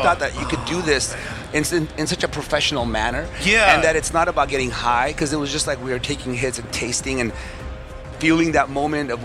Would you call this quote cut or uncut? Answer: uncut